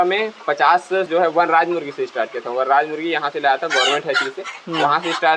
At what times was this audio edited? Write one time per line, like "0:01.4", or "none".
0:01.1